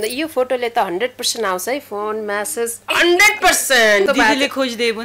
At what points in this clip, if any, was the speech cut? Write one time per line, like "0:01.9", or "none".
0:04.1

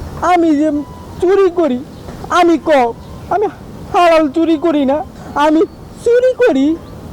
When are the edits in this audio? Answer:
0:05.2

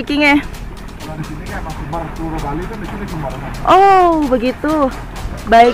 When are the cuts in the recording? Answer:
none

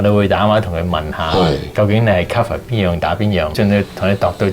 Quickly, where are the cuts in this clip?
0:03.5

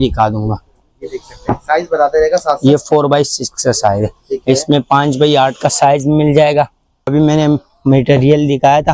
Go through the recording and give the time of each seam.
0:07.1

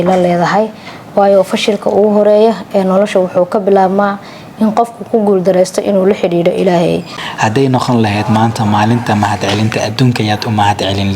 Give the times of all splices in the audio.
0:07.0

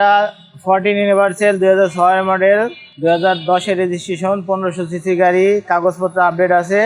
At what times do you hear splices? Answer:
0:02.8

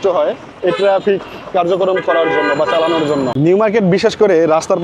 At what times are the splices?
0:03.3

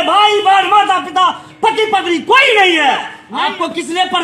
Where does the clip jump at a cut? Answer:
0:03.2

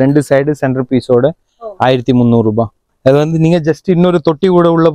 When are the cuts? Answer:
0:02.9

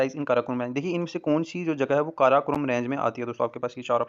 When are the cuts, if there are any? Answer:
none

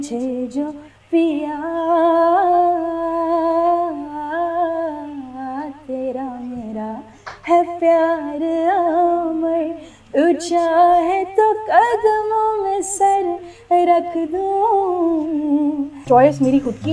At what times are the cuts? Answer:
0:16.0

